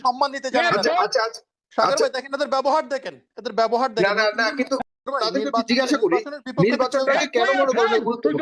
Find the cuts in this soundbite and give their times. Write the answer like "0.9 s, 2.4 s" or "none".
none